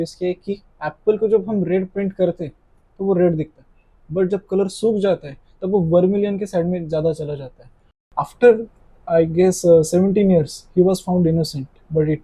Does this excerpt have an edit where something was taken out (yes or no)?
yes